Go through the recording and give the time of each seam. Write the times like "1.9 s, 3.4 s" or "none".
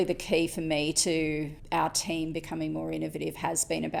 none